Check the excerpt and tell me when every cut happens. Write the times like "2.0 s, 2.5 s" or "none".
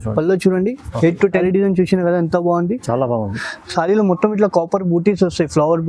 1.4 s